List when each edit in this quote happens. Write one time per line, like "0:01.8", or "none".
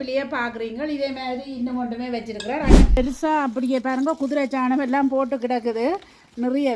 0:03.0